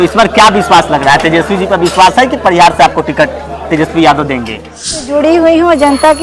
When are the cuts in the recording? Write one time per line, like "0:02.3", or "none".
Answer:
0:05.1